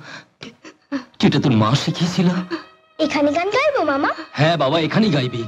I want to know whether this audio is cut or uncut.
uncut